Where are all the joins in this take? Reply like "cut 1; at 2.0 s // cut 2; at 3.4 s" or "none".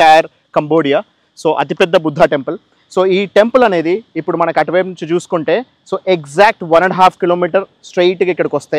none